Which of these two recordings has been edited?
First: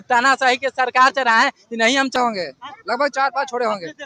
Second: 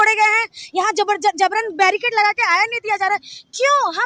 first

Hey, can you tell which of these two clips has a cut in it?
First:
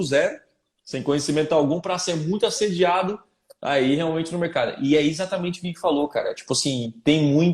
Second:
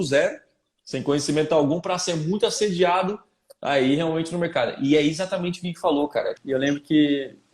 second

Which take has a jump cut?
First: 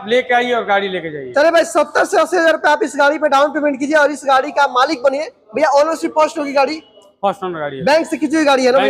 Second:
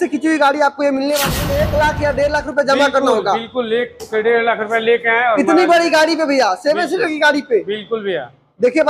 second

